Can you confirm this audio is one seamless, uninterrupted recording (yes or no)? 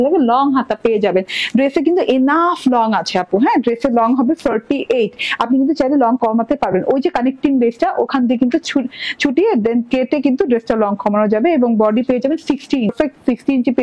no